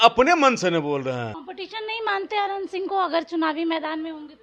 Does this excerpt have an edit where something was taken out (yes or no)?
yes